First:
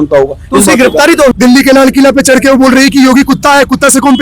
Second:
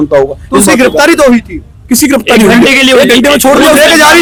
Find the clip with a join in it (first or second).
first